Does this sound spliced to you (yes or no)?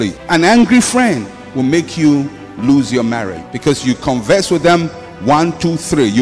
no